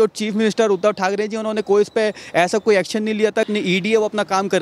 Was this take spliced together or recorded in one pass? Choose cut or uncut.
cut